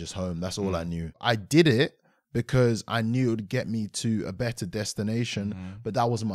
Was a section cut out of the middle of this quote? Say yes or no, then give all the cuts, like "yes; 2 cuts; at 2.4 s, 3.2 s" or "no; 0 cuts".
yes; 1 cut; at 1.2 s